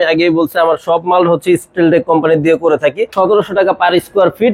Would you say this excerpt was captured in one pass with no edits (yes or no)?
no